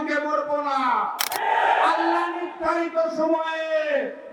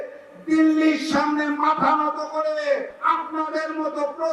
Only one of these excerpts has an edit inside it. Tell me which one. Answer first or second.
second